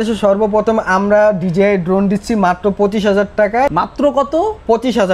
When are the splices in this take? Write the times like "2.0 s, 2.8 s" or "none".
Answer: 3.7 s